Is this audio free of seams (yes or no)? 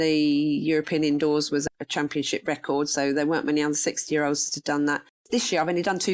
no